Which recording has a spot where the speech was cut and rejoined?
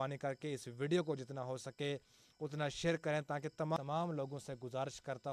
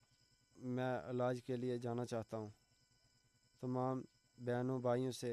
first; 1 cut; at 3.8 s

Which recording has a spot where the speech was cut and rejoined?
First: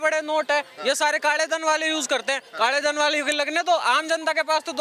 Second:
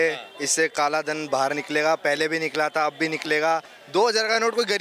second; 1 cut; at 3.8 s

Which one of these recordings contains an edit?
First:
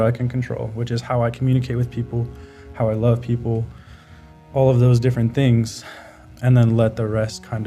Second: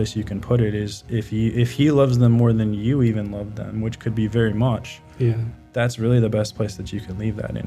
first; 1 cut; at 6.3 s

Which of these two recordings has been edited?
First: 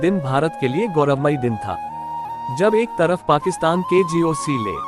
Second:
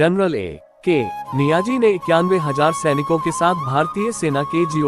second; 1 cut; at 1.3 s

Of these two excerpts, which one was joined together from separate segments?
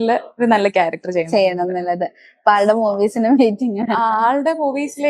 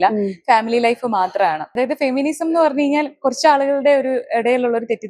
second; 1 cut; at 1.7 s

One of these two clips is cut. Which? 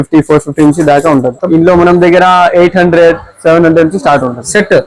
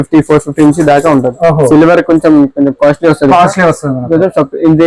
first; 1 cut; at 1.4 s

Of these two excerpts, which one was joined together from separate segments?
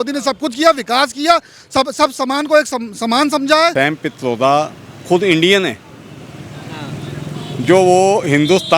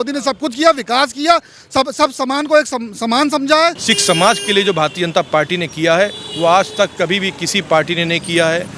first; 1 cut; at 3.7 s

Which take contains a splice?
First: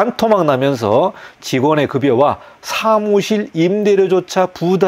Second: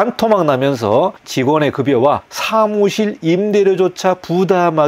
second; 2 cuts; at 1.2 s, 2.3 s

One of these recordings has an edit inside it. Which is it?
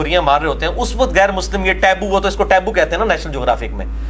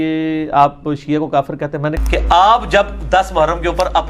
second; 1 cut; at 1.8 s

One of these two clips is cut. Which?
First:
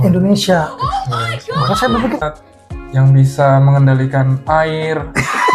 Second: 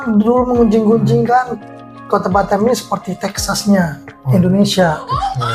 first; 1 cut; at 2.2 s

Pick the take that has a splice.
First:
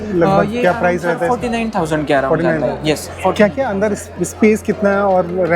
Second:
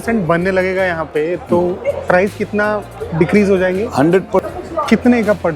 second; 1 cut; at 4.5 s

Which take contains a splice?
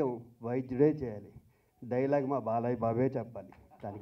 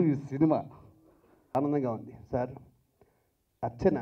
second; 1 cut; at 1.5 s

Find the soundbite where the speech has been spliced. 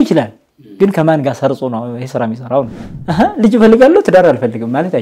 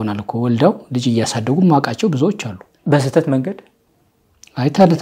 first; 1 cut; at 2.9 s

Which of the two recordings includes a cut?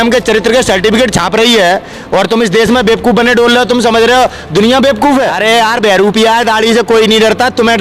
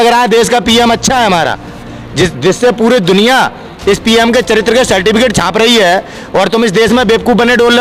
first; 1 cut; at 5.4 s

